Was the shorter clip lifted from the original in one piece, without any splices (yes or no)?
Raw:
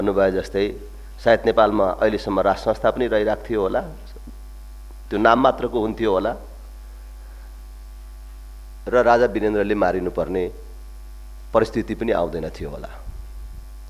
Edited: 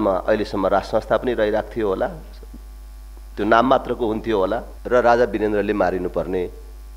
no